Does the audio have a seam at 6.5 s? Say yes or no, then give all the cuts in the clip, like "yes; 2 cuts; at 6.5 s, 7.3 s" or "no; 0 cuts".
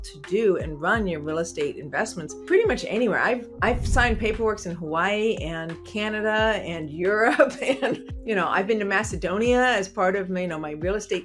no; 3 cuts; at 2.3 s, 3.5 s, 8.1 s